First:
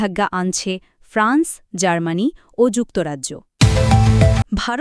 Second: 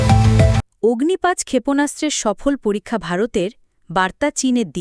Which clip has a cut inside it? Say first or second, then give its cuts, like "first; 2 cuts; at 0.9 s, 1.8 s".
first; 1 cut; at 3.5 s